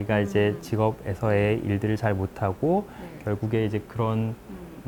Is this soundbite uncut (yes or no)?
yes